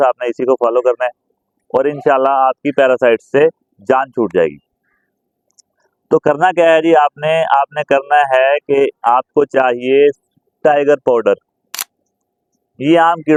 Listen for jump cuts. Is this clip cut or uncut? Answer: uncut